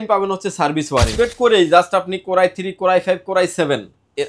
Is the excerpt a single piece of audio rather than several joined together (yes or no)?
no